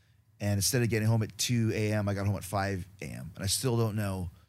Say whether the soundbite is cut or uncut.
uncut